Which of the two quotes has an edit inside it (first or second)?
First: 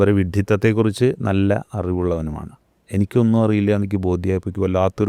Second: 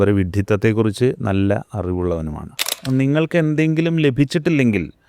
second